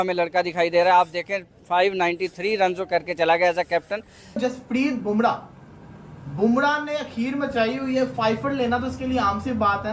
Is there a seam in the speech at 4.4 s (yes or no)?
yes